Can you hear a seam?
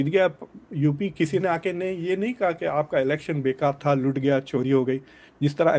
no; 0 cuts

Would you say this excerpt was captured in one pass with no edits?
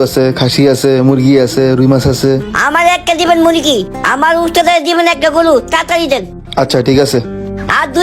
yes; 0 cuts

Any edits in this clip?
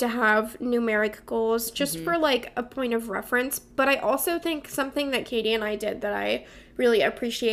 no; 0 cuts

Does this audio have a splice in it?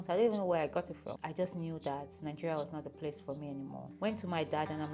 yes; 2 cuts; at 1.1 s, 3.8 s

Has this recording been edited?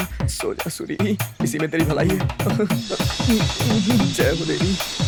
no; 0 cuts

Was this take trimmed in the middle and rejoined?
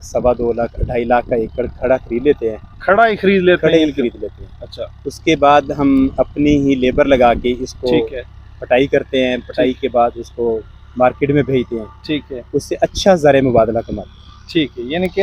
no; 0 cuts

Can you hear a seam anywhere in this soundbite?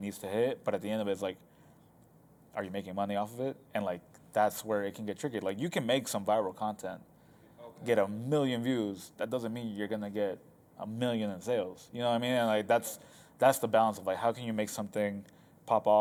no; 0 cuts

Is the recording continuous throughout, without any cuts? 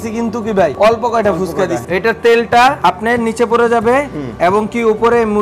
no; 3 cuts; at 0.7 s, 1.8 s, 2.8 s

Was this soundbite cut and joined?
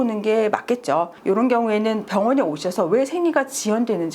yes; 1 cut; at 1.2 s

